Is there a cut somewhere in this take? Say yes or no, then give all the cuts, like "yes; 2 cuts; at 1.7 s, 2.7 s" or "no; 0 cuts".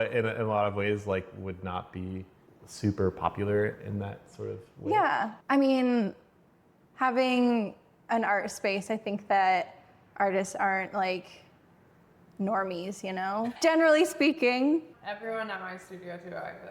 yes; 3 cuts; at 5.4 s, 13.5 s, 14.9 s